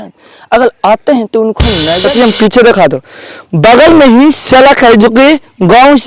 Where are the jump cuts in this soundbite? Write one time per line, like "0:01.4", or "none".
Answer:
0:01.9